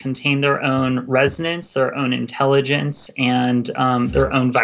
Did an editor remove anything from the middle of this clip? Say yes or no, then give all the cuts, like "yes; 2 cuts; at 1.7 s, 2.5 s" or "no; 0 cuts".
no; 0 cuts